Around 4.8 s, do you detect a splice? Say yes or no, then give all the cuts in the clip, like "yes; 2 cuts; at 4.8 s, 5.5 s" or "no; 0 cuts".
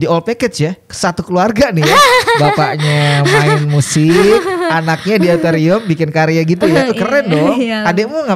no; 0 cuts